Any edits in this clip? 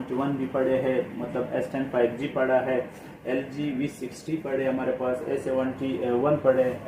no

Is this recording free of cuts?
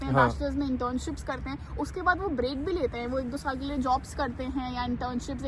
yes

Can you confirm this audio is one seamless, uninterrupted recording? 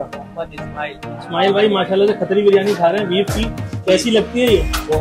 yes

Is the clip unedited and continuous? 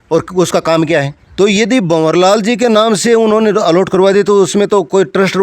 no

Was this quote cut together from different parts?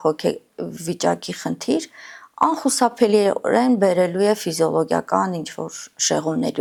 no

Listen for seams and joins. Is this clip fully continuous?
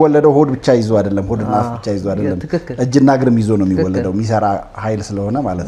yes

